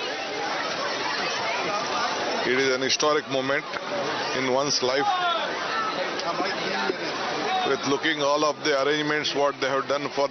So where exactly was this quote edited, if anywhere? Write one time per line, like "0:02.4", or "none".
none